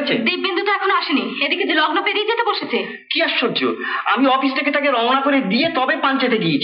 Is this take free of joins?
yes; 0 cuts

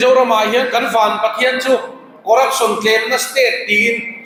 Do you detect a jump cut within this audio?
no; 0 cuts

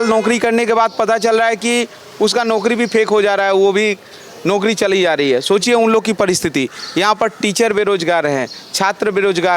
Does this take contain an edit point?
no; 0 cuts

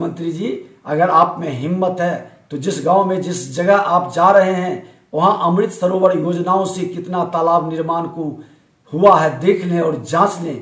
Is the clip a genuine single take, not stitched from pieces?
yes; 0 cuts

